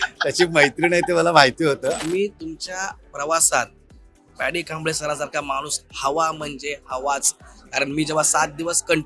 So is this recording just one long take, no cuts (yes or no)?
no